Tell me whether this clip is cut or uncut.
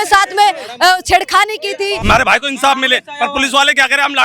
cut